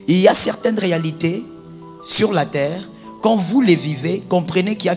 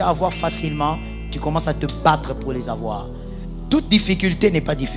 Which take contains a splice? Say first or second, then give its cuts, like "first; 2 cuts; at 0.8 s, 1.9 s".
second; 1 cut; at 3.6 s